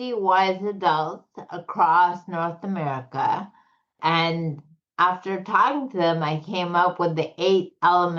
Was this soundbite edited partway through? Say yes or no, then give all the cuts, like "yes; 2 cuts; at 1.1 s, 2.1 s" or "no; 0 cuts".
yes; 1 cut; at 3.9 s